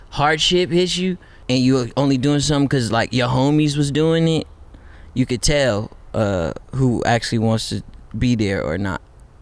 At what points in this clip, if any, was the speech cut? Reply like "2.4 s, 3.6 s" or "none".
1.3 s